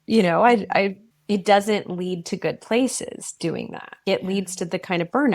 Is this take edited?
yes; 2 cuts; at 1.1 s, 4.0 s

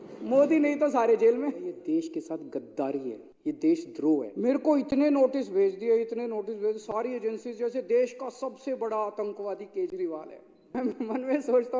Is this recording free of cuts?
no; 4 cuts; at 1.8 s, 3.3 s, 4.3 s, 10.7 s

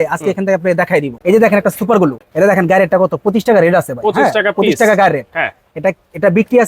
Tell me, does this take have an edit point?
yes; 2 cuts; at 1.1 s, 2.2 s

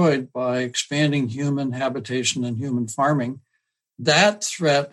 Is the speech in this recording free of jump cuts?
no; 1 cut; at 3.6 s

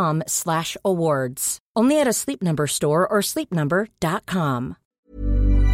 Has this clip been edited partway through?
yes; 1 cut; at 4.8 s

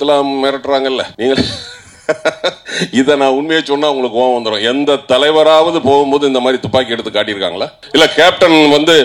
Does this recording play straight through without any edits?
no; 2 cuts; at 1.1 s, 7.7 s

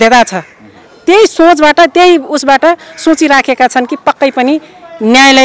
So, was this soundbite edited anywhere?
no; 0 cuts

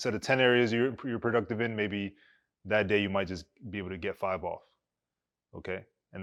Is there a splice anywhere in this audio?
no; 0 cuts

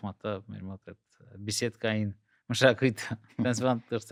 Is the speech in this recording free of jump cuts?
yes; 0 cuts

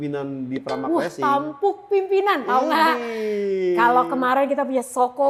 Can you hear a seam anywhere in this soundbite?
no; 0 cuts

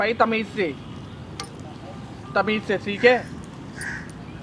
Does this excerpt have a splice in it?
no; 0 cuts

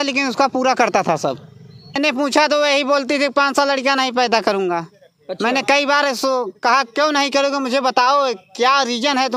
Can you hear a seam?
yes; 1 cut; at 2.0 s

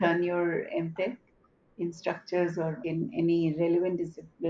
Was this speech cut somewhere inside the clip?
yes; 1 cut; at 2.8 s

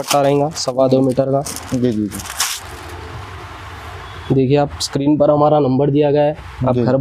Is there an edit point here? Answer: no; 0 cuts

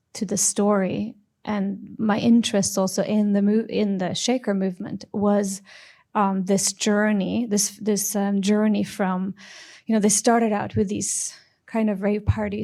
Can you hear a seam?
no; 0 cuts

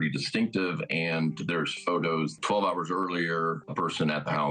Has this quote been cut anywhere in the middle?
yes; 2 cuts; at 2.3 s, 3.6 s

